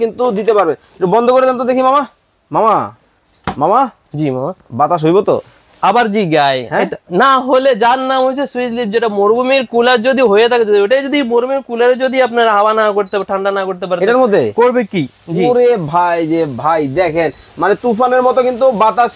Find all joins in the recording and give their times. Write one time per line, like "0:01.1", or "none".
none